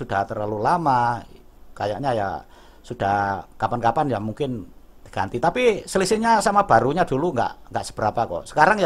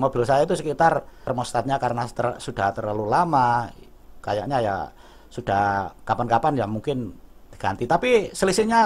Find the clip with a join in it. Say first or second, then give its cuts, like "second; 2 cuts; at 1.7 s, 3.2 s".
second; 1 cut; at 1.3 s